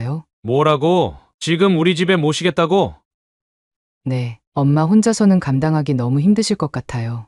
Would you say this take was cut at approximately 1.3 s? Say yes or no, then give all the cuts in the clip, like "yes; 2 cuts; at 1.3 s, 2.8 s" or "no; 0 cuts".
yes; 1 cut; at 1.3 s